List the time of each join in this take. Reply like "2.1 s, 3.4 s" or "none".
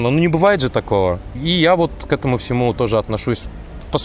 none